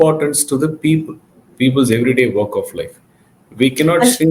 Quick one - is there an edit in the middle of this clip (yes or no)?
no